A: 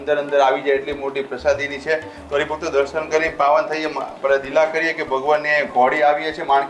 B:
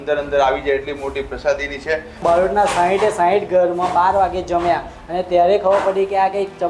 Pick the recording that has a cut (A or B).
B